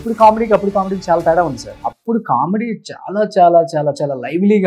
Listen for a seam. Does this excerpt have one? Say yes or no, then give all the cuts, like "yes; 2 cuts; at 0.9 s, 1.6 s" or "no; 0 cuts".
yes; 1 cut; at 1.7 s